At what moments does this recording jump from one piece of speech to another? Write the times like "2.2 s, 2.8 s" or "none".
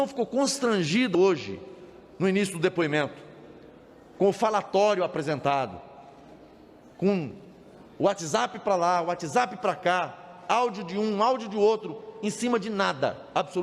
1.1 s